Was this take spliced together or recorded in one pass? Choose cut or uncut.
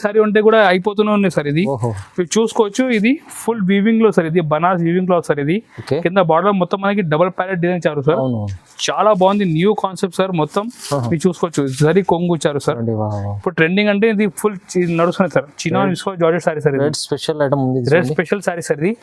uncut